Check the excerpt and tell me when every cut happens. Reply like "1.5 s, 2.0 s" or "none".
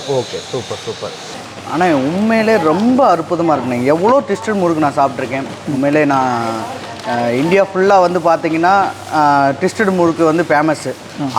1.4 s